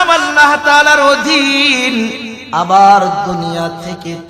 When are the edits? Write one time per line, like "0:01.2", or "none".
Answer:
0:02.3